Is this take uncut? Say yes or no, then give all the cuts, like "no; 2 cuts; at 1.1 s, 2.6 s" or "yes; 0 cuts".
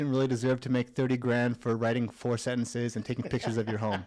yes; 0 cuts